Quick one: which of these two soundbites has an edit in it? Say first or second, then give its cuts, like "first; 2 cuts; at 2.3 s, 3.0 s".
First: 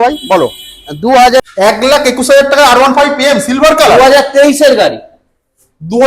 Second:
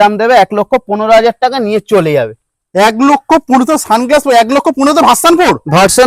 first; 1 cut; at 1.4 s